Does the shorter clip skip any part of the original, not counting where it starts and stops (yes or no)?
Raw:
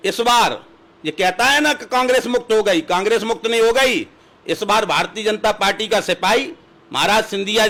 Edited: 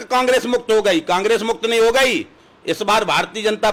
no